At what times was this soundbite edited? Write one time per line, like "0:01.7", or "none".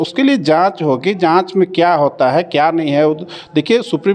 none

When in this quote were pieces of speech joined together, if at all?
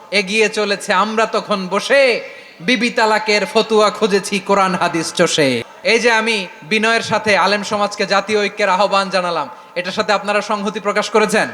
0:05.7

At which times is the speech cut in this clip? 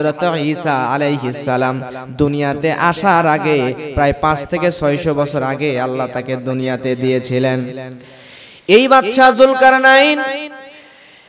none

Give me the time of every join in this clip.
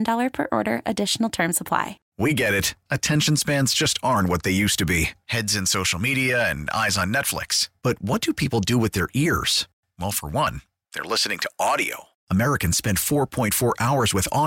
0:02.0

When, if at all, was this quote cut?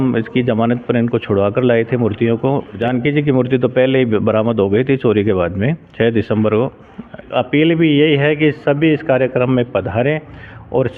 0:02.8
0:07.3

